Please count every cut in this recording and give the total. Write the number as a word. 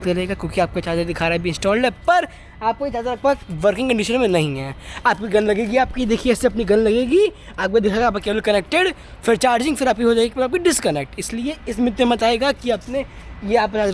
zero